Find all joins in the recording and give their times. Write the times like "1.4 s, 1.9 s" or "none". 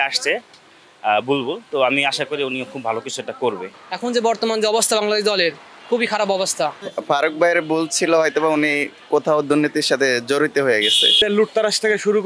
3.7 s, 6.9 s, 11.2 s